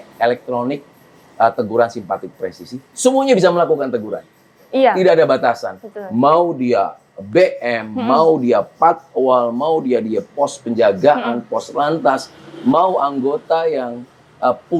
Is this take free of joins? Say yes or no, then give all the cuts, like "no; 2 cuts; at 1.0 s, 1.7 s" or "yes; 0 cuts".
yes; 0 cuts